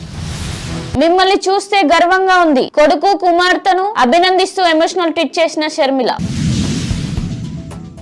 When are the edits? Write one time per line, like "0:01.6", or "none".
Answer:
0:00.9